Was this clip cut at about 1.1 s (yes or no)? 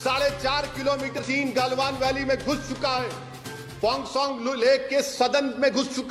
yes